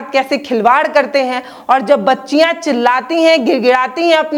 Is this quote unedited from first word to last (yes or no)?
yes